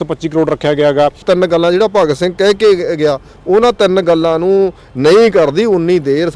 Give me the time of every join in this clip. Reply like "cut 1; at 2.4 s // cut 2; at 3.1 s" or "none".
cut 1; at 1.2 s